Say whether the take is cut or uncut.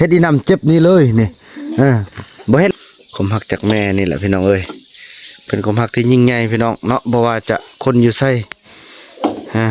cut